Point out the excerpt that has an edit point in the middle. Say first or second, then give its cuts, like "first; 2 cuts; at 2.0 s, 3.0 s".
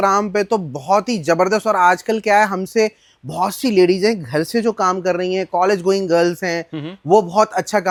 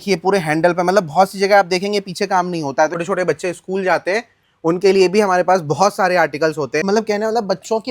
second; 2 cuts; at 3.0 s, 6.8 s